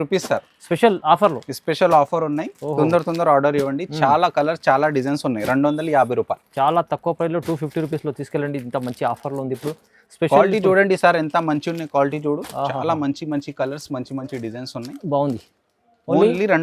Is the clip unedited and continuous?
yes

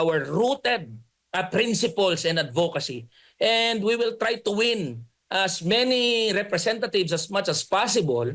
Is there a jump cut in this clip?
no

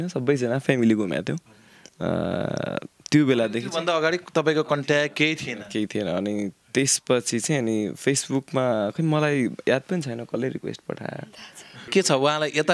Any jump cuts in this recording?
yes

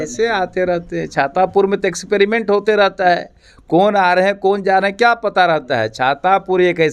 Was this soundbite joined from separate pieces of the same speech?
no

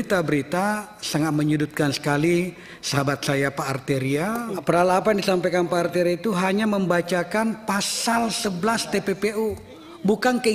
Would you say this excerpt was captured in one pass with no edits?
no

